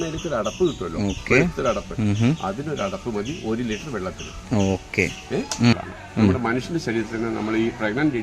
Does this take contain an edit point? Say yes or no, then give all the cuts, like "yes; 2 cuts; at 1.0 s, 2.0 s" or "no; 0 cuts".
yes; 1 cut; at 5.8 s